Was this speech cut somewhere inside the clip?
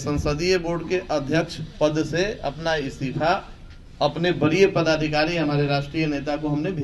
no; 0 cuts

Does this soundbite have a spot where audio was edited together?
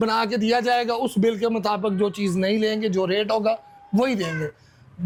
no; 0 cuts

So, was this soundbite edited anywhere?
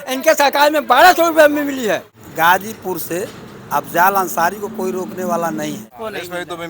yes; 2 cuts; at 2.2 s, 5.9 s

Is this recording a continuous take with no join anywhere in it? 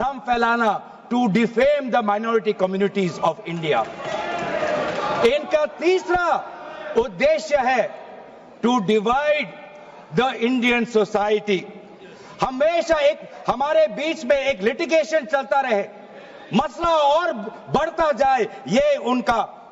yes; 0 cuts

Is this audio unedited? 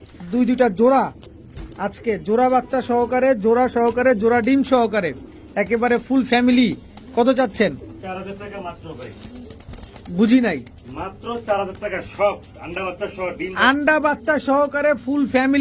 yes; 0 cuts

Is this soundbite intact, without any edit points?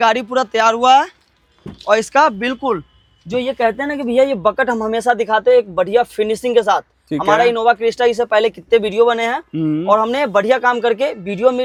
yes; 0 cuts

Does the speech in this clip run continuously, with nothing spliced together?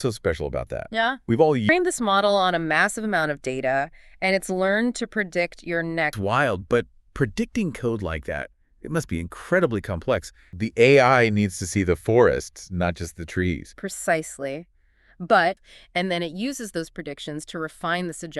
no; 4 cuts; at 1.6 s, 6.1 s, 10.6 s, 15.6 s

